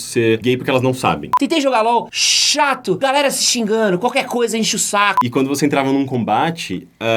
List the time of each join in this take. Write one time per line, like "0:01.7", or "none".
0:01.3
0:03.0
0:05.2